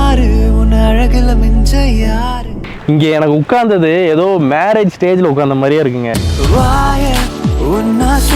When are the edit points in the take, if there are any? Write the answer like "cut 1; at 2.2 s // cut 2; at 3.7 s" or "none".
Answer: cut 1; at 2.5 s

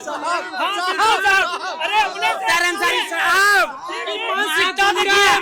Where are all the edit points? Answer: none

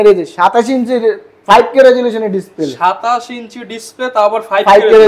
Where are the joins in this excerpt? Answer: none

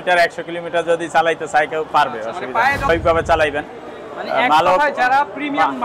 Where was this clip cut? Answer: cut 1; at 2.9 s

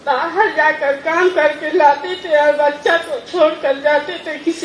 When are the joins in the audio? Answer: none

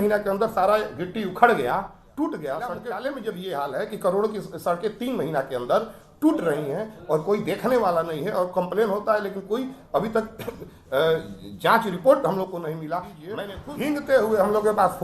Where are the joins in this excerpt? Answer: cut 1; at 2.9 s // cut 2; at 13.3 s

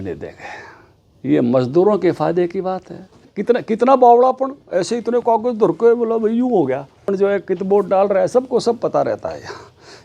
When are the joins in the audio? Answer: cut 1; at 3.3 s // cut 2; at 7.1 s

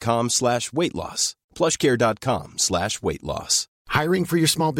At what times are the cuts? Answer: none

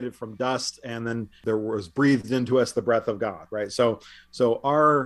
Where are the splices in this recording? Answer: cut 1; at 1.4 s

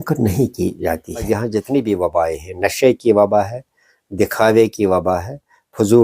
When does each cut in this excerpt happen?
cut 1; at 1.3 s

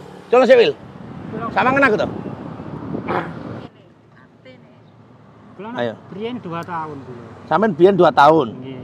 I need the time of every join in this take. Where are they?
cut 1; at 3.5 s

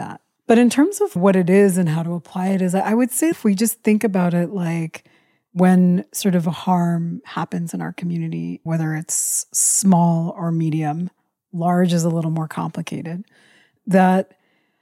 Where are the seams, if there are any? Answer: cut 1; at 1.2 s // cut 2; at 3.3 s

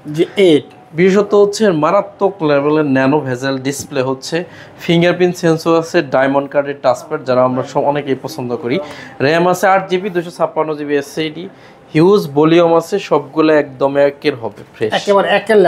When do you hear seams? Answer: none

